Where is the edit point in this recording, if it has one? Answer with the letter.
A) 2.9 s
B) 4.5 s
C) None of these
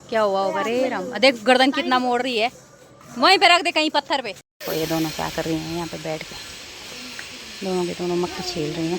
B